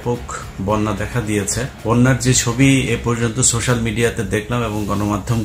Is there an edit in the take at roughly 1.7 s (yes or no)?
yes